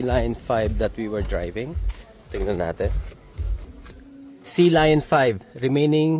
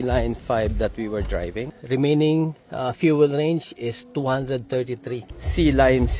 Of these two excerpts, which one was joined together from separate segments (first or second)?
second